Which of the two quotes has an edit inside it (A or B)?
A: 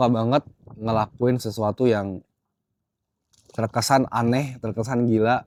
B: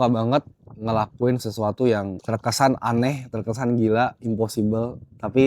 B